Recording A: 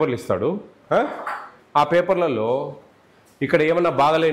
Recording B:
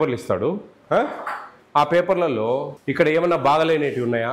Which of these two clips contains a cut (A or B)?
B